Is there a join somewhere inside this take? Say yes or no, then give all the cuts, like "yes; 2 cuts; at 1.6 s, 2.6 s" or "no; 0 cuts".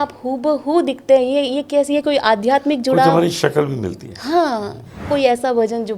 yes; 1 cut; at 5.1 s